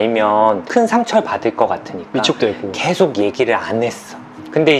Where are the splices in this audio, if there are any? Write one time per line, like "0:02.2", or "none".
none